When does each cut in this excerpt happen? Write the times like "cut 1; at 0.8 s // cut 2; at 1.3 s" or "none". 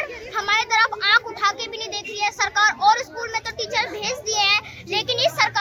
none